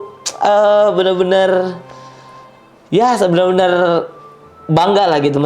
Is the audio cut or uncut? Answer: uncut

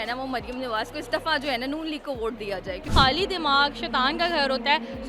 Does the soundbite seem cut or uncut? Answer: cut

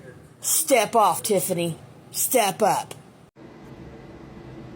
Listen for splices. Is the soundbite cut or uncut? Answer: cut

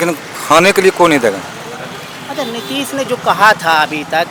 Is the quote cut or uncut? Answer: uncut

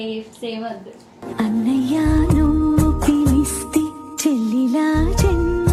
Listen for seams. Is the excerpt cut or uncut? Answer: uncut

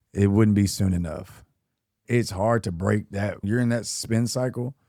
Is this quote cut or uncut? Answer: cut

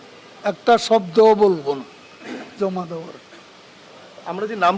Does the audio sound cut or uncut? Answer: uncut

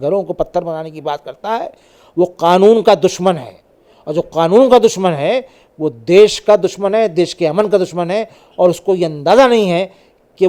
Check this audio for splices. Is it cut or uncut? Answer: uncut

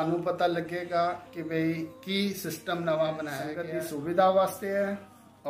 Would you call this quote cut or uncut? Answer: cut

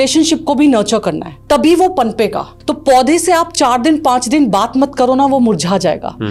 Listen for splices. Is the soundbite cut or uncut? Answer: uncut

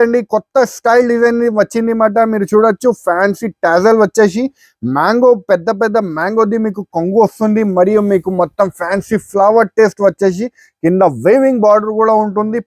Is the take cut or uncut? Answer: uncut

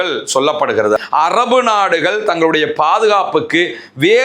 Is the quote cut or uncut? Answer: cut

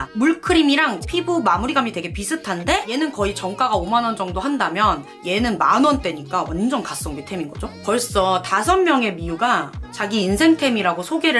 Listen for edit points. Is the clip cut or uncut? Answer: cut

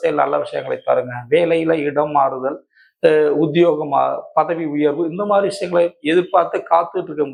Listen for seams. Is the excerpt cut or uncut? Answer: uncut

